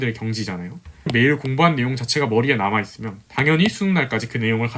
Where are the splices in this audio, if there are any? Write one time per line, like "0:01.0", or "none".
0:01.1